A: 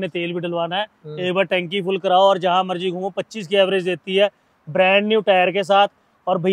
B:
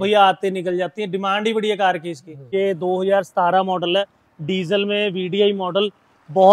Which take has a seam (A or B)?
B